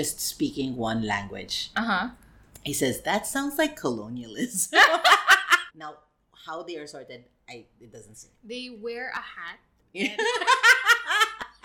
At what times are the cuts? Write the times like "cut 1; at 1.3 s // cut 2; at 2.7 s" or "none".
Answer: cut 1; at 1.6 s // cut 2; at 5.7 s